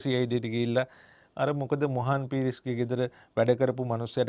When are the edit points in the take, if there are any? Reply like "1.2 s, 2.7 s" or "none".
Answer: none